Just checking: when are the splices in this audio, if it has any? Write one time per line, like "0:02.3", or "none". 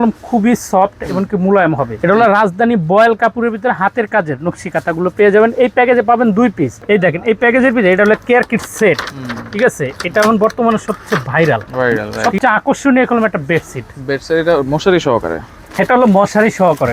0:01.9
0:06.8
0:12.1